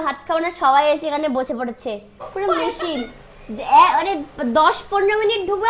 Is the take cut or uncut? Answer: cut